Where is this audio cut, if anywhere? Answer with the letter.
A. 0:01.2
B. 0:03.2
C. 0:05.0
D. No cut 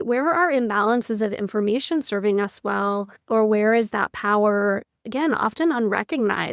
B